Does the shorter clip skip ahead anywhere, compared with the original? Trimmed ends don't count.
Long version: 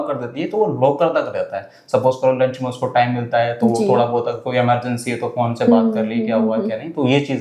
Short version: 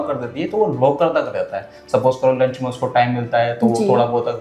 no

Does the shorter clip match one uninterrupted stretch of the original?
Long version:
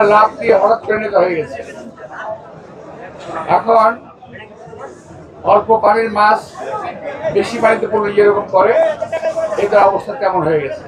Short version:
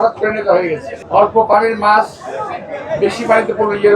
no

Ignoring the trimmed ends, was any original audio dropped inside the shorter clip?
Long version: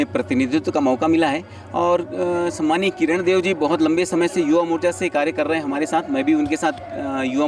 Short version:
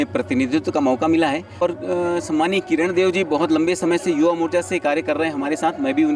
yes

